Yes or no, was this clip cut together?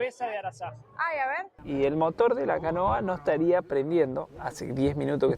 yes